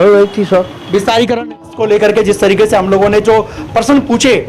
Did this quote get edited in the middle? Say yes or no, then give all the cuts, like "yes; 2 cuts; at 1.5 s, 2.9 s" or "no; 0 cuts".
yes; 1 cut; at 1.5 s